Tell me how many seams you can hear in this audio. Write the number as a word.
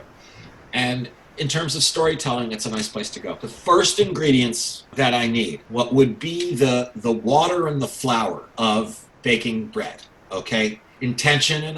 five